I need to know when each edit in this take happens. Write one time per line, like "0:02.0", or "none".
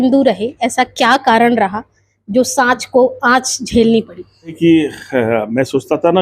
0:04.6